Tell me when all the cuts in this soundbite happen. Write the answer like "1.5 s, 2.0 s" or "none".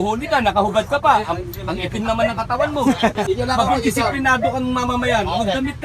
3.2 s